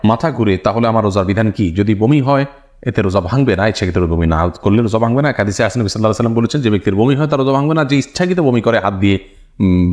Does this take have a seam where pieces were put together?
no; 0 cuts

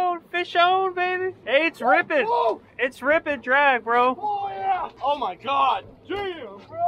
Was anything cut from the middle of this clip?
yes; 2 cuts; at 1.4 s, 4.9 s

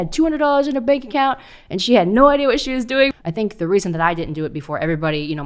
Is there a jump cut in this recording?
yes; 1 cut; at 3.1 s

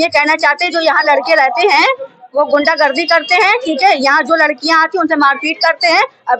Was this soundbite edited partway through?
no; 0 cuts

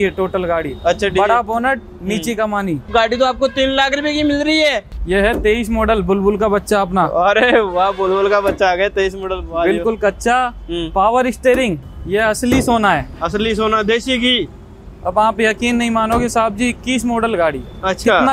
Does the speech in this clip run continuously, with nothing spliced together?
no; 3 cuts; at 2.9 s, 4.9 s, 11.8 s

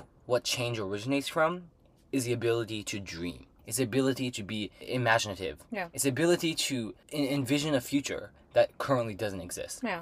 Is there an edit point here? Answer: yes; 3 cuts; at 3.6 s, 4.8 s, 7.0 s

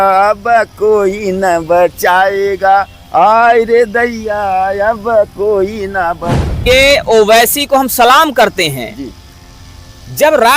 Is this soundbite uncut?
no; 1 cut; at 6.6 s

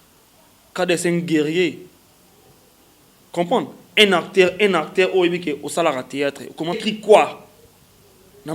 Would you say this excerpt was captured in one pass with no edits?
no; 1 cut; at 6.8 s

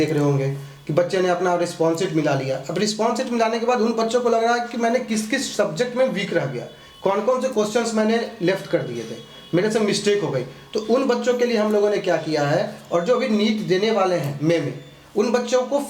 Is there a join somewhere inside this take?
no; 0 cuts

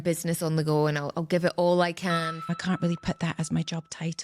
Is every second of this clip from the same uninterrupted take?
no; 1 cut; at 2.3 s

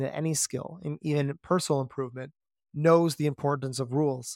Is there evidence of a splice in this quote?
no; 0 cuts

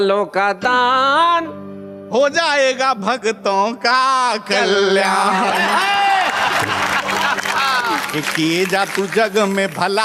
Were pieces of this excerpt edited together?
no; 0 cuts

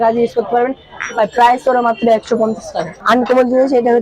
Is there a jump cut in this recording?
no; 0 cuts

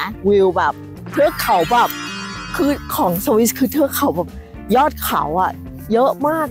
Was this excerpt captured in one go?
yes; 0 cuts

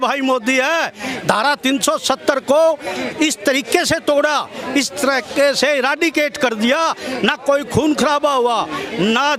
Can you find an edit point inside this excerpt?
no; 0 cuts

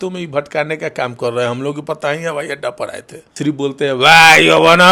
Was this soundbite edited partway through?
yes; 1 cut; at 3.2 s

